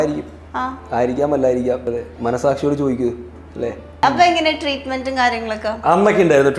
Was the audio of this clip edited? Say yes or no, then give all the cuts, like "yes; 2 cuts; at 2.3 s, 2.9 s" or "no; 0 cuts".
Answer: yes; 2 cuts; at 1.8 s, 4.0 s